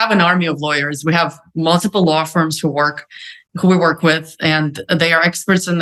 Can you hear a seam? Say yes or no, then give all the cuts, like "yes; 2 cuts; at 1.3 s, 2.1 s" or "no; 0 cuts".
no; 0 cuts